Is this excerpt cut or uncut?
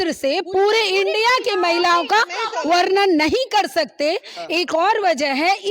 uncut